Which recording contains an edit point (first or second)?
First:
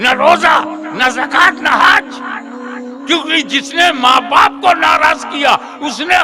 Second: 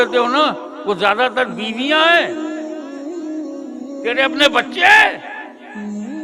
second